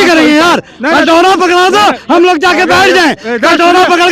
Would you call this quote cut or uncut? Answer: uncut